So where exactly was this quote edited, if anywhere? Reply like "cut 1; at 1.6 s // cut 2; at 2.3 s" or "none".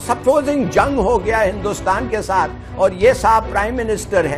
cut 1; at 2.7 s

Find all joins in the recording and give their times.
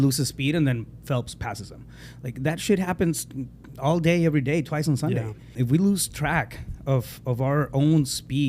cut 1; at 5.6 s

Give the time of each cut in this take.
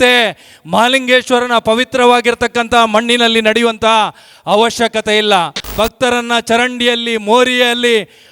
cut 1; at 5.7 s

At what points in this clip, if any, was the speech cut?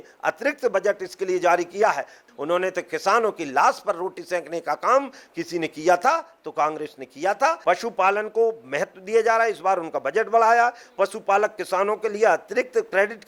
cut 1; at 2.2 s // cut 2; at 7.6 s

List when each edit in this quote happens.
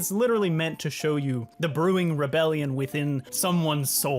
cut 1; at 1.5 s // cut 2; at 3.3 s

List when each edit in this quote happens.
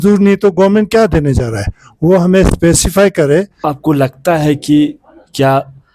cut 1; at 3.6 s

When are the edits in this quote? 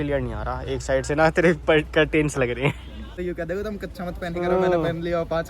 cut 1; at 3.3 s

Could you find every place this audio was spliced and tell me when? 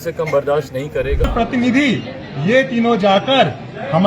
cut 1; at 1.3 s

